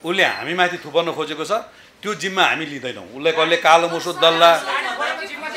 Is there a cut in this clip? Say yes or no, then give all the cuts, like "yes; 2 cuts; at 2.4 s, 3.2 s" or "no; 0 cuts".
no; 0 cuts